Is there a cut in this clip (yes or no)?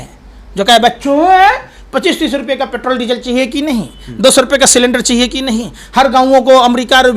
no